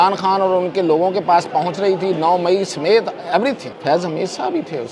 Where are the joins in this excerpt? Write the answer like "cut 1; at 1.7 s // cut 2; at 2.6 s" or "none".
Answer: cut 1; at 3.7 s

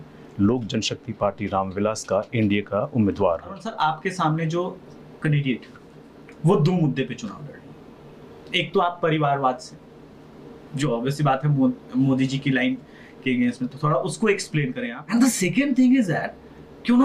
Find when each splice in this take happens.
cut 1; at 3.7 s // cut 2; at 14.9 s

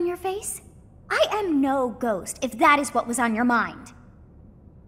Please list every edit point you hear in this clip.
cut 1; at 4.0 s

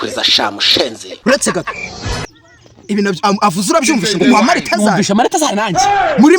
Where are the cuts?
cut 1; at 1.2 s

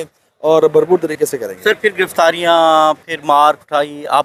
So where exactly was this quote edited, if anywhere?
none

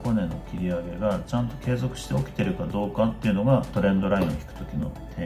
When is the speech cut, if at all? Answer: none

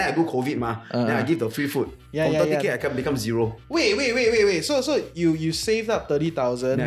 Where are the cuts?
none

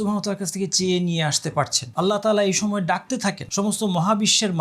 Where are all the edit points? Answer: cut 1; at 1.8 s // cut 2; at 3.4 s

